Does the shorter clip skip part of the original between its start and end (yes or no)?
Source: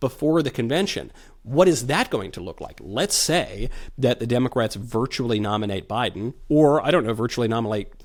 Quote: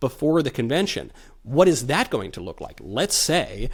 no